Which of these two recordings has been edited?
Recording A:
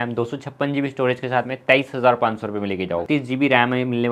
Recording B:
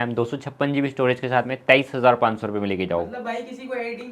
A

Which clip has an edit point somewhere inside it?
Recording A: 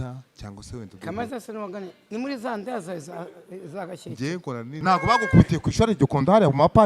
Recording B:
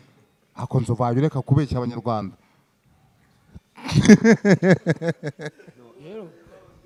A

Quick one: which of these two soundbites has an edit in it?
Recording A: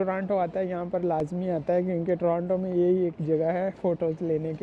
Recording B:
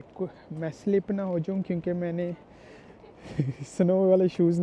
B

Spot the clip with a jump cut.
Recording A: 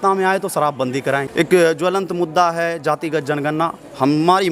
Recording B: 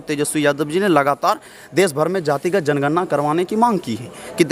A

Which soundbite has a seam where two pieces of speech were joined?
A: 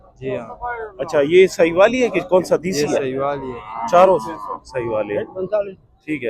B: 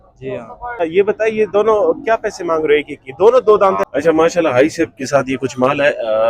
B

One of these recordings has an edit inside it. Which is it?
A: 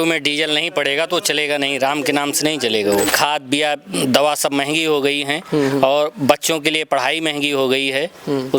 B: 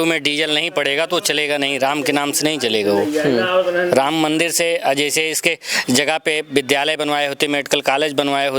A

